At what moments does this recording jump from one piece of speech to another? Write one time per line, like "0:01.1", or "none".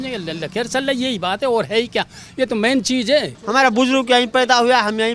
0:03.4